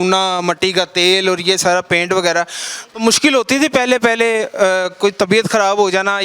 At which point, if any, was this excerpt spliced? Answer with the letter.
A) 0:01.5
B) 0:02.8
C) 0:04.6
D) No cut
B